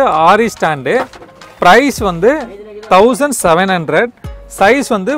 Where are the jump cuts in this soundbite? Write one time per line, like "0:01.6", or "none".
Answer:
none